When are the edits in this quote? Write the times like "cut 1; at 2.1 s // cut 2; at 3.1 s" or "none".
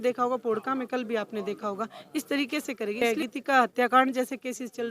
cut 1; at 3.0 s